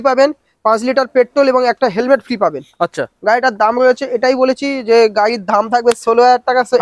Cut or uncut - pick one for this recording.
uncut